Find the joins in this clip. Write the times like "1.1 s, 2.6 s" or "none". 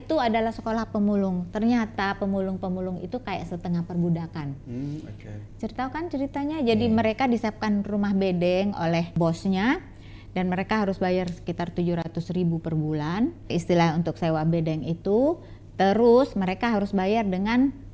9.2 s, 13.5 s